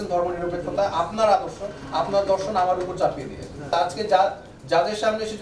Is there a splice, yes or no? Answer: yes